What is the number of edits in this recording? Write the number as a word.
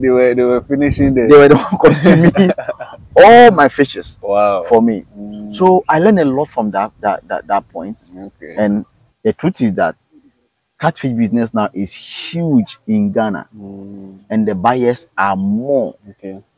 one